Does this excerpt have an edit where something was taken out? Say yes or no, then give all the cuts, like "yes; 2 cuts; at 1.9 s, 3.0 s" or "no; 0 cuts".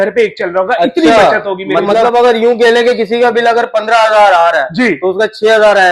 yes; 1 cut; at 1.9 s